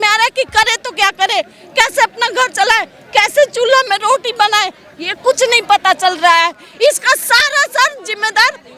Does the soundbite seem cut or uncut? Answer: uncut